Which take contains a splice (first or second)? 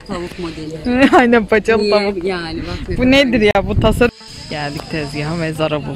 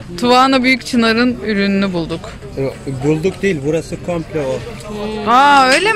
first